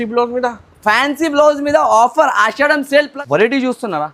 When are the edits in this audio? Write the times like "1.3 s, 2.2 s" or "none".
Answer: 3.1 s